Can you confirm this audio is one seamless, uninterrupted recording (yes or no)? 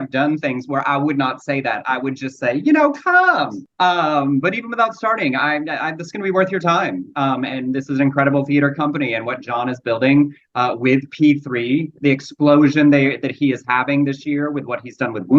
no